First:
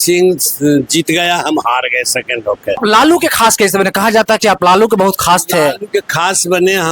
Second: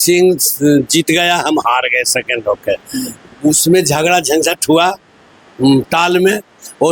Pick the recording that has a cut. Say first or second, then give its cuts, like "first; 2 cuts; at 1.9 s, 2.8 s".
first; 1 cut; at 2.8 s